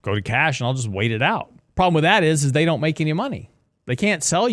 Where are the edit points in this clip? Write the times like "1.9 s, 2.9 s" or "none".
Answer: 1.6 s

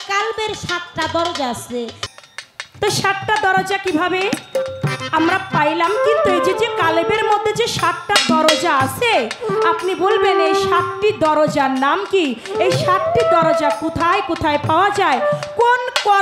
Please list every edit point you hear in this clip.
2.0 s

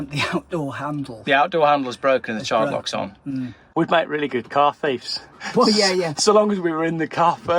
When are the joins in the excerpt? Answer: 3.6 s

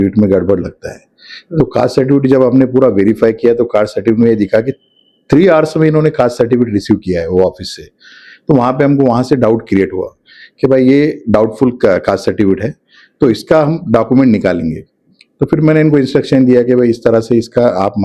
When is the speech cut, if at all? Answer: none

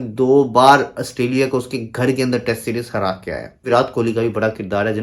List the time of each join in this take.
3.6 s

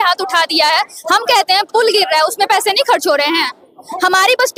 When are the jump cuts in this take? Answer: none

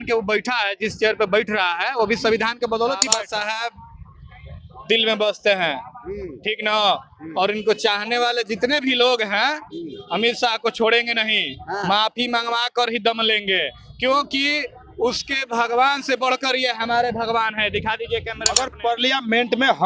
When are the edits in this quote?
3.1 s, 18.7 s

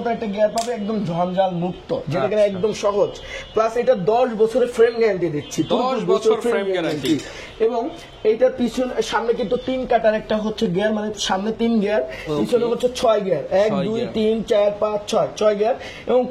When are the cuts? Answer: none

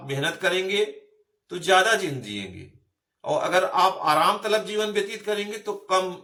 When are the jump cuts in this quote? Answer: none

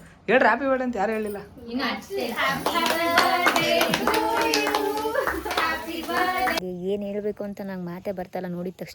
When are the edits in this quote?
6.6 s

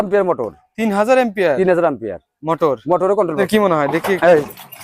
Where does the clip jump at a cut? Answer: 3.4 s

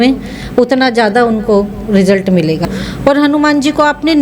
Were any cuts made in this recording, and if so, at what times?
2.6 s

